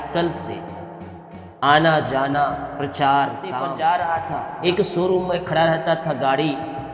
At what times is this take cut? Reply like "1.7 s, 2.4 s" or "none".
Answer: 3.6 s, 4.5 s